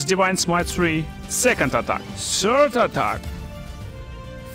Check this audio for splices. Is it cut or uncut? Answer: uncut